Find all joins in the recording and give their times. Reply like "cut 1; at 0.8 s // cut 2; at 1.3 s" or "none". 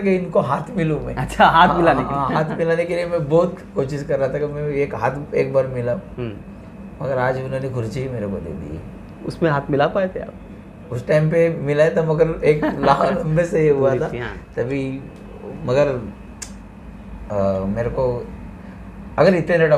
none